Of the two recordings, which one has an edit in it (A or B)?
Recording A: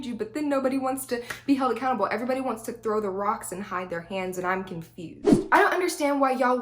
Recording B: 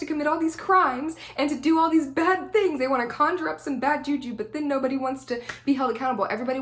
A